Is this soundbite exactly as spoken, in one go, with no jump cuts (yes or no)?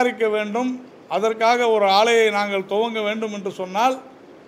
yes